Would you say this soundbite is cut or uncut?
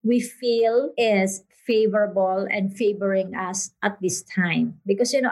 cut